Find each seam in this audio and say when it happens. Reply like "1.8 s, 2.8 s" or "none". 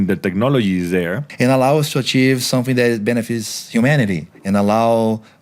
1.3 s, 4.3 s